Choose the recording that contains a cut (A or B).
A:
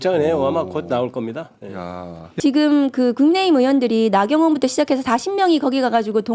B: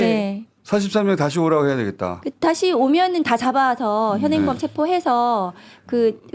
A